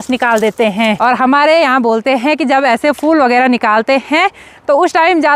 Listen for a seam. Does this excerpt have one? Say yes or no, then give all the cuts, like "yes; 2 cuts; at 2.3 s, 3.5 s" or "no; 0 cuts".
yes; 1 cut; at 1.0 s